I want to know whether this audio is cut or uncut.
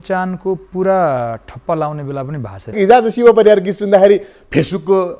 cut